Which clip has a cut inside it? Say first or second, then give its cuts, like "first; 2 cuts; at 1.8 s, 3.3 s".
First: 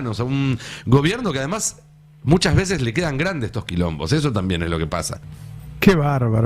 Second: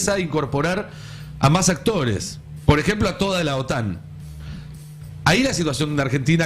first; 1 cut; at 5.1 s